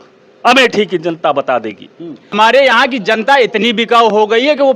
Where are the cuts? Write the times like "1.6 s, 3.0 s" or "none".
2.3 s